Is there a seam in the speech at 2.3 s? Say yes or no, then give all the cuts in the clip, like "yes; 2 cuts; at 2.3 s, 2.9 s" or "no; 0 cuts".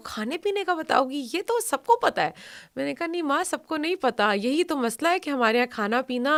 no; 0 cuts